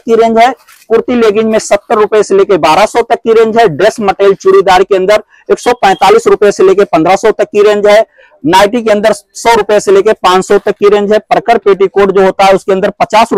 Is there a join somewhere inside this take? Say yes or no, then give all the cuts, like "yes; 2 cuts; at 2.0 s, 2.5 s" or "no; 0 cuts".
no; 0 cuts